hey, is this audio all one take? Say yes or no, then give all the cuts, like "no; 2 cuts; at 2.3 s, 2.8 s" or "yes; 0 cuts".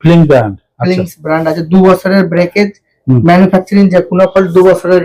yes; 0 cuts